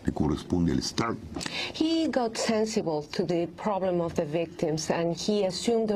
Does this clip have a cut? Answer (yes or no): no